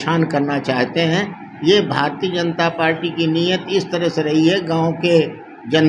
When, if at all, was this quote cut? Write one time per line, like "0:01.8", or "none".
none